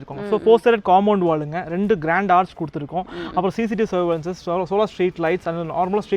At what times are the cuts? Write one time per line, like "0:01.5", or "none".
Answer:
none